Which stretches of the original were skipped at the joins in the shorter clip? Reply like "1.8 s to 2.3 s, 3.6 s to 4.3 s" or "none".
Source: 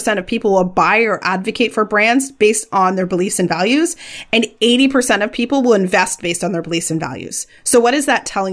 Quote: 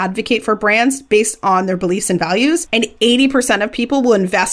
4.0 s to 4.3 s